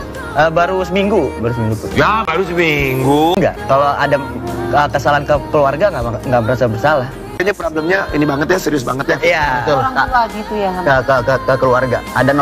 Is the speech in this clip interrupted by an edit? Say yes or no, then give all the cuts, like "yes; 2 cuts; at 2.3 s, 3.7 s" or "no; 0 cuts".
no; 0 cuts